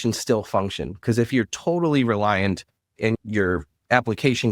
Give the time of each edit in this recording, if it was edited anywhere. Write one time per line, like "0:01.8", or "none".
none

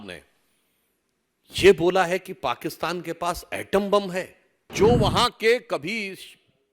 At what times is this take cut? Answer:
0:04.7

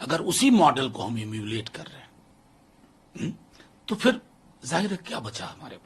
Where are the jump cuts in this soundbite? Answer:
none

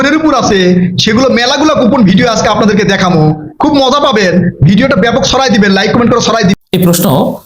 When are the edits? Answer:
0:06.6

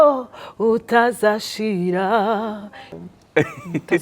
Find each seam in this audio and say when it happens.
0:02.9

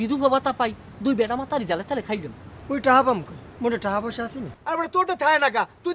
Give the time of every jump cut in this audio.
0:02.4
0:04.5

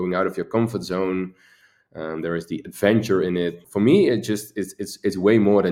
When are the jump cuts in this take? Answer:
0:03.6

